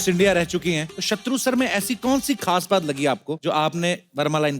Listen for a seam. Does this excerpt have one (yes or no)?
yes